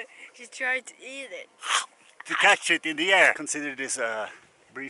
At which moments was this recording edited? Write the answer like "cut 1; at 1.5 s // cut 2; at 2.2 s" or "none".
cut 1; at 3.4 s